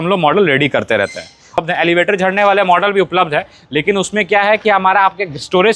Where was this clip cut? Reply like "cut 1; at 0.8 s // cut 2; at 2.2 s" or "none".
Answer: cut 1; at 1.6 s